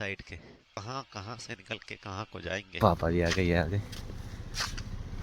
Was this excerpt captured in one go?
no; 2 cuts; at 0.8 s, 2.7 s

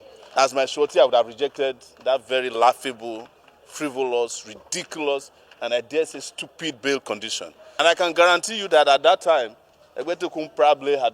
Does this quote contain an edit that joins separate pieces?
yes; 1 cut; at 7.8 s

